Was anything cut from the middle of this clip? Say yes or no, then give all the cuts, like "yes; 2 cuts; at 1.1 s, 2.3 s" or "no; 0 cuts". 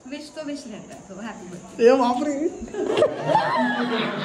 no; 0 cuts